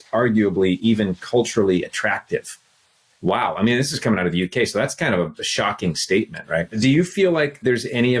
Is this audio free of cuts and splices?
no; 1 cut; at 6.7 s

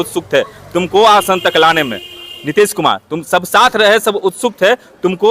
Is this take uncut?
yes; 0 cuts

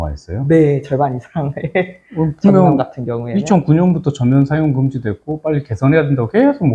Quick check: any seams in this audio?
no; 0 cuts

